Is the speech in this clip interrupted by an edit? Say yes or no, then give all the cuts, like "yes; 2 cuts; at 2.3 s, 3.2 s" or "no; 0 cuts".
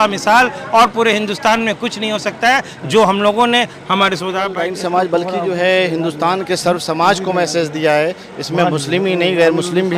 yes; 1 cut; at 4.5 s